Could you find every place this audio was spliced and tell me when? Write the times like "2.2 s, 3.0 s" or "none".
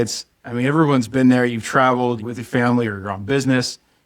2.3 s